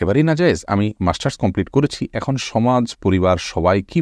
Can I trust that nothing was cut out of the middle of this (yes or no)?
yes